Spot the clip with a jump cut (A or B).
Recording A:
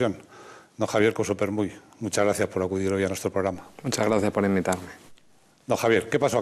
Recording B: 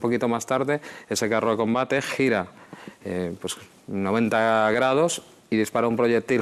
A